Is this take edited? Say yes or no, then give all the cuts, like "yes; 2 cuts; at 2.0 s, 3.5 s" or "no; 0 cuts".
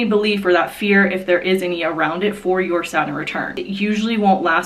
yes; 1 cut; at 3.6 s